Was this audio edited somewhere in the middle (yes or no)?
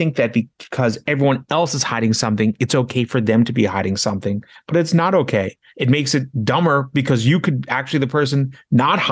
yes